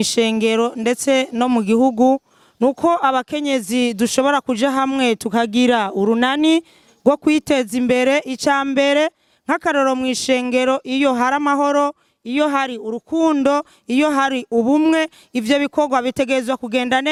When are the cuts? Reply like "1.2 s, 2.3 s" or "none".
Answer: none